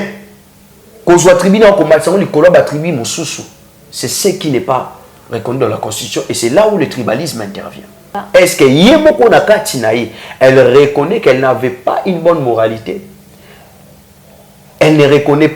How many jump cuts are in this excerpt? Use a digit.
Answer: 1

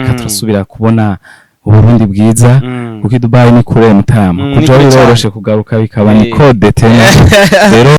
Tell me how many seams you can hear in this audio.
0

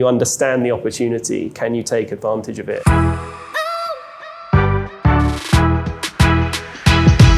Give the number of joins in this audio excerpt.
1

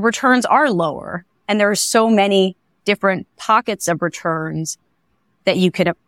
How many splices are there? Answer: 0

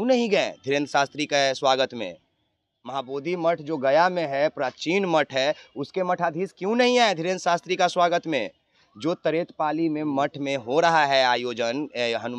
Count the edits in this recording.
0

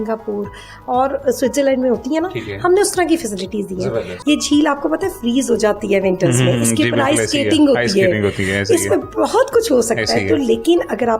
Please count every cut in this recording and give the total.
1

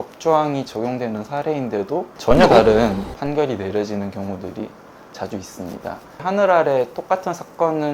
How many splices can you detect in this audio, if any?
3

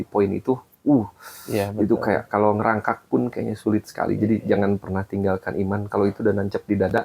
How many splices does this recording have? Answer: 0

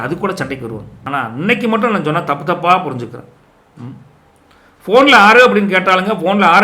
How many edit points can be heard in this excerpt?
1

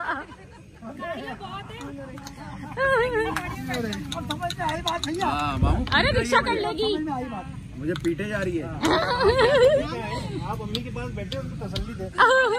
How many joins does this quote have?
0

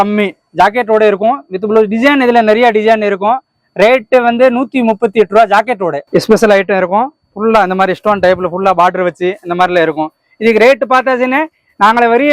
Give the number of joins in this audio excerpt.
1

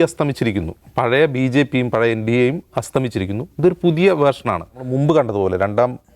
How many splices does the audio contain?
1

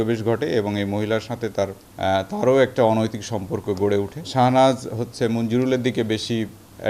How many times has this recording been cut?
2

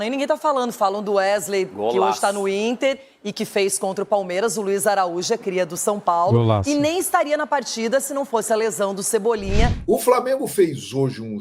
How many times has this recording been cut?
1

